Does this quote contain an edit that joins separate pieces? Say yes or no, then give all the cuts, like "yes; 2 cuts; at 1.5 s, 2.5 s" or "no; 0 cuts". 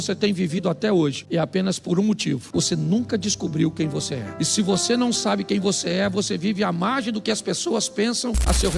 no; 0 cuts